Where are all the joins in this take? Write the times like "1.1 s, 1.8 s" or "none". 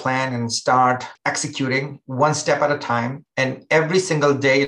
1.1 s, 3.2 s